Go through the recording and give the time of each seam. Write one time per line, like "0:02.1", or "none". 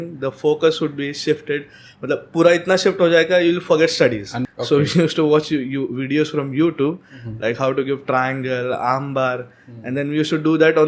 0:04.4